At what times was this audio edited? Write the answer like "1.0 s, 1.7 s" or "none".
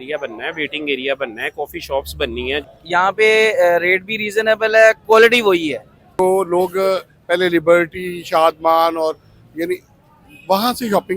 2.7 s, 6.2 s